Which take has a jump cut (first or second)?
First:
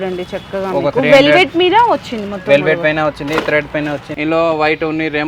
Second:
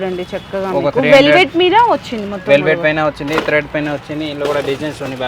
first